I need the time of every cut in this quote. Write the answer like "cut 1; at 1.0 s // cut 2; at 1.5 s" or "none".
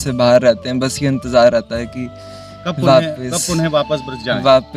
none